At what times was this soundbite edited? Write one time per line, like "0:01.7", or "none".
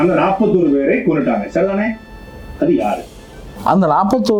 none